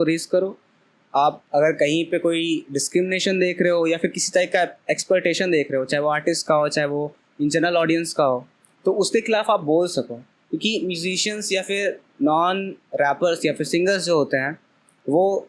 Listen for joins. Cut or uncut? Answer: uncut